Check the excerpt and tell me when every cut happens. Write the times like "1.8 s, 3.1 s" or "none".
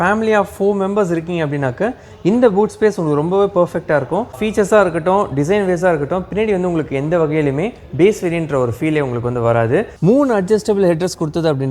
4.3 s, 9.9 s